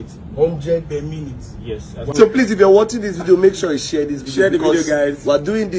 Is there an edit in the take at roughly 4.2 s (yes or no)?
no